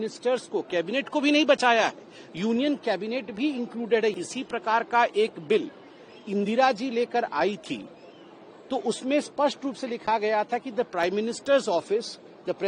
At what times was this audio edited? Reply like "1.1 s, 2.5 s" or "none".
4.2 s